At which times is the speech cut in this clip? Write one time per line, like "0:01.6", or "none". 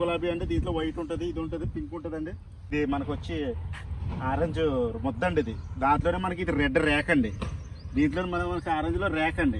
0:02.7